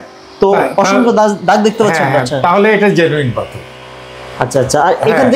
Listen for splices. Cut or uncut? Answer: uncut